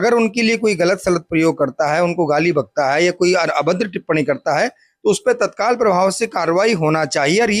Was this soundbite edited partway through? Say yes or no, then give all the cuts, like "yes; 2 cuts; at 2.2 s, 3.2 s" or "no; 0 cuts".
no; 0 cuts